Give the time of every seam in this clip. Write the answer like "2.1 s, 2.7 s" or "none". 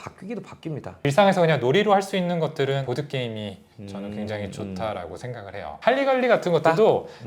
1.0 s, 2.8 s, 5.8 s